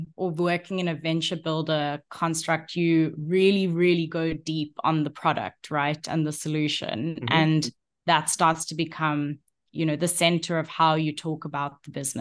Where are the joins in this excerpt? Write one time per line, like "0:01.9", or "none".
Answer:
none